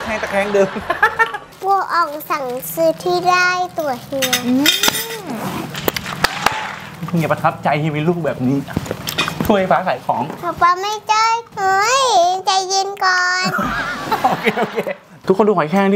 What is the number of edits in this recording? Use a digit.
3